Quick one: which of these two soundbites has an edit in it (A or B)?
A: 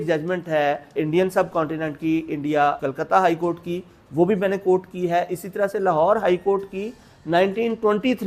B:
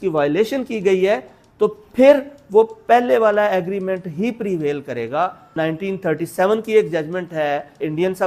B